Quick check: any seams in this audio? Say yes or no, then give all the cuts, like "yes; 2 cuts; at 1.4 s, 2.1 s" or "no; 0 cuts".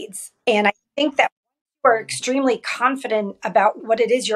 no; 0 cuts